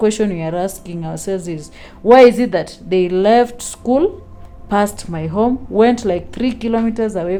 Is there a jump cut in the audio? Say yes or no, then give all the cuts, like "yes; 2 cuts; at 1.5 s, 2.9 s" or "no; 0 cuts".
no; 0 cuts